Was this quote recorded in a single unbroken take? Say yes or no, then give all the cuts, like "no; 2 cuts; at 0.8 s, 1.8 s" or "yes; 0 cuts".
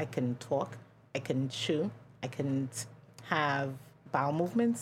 yes; 0 cuts